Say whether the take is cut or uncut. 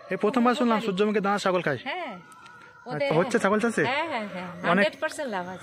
cut